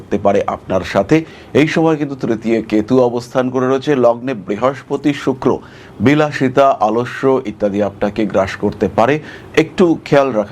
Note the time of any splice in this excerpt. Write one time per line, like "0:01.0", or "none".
0:01.4